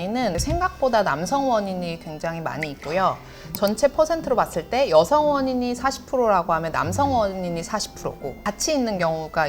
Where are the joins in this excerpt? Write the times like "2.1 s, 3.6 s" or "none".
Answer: none